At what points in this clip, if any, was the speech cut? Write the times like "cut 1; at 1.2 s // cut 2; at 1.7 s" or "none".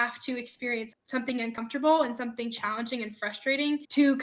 none

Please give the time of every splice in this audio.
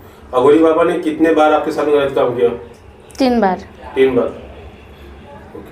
none

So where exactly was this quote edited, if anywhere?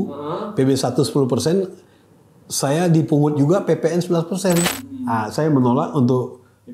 cut 1; at 4.8 s

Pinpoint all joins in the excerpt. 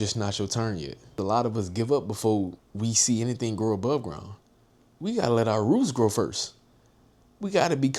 cut 1; at 1.2 s // cut 2; at 2.6 s

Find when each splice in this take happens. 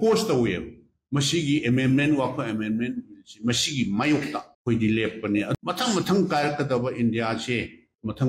cut 1; at 5.5 s

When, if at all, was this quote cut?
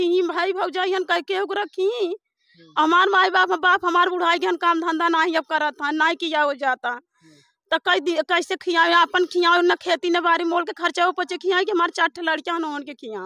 none

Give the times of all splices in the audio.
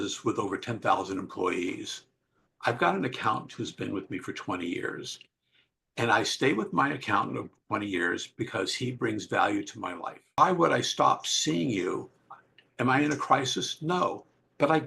cut 1; at 10.4 s

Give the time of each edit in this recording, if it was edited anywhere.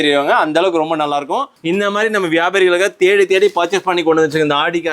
cut 1; at 1.5 s

